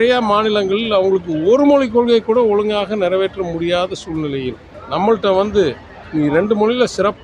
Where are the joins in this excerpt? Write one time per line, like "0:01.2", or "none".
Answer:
0:04.7